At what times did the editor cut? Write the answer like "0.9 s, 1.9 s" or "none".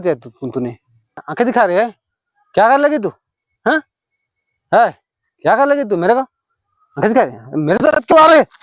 1.2 s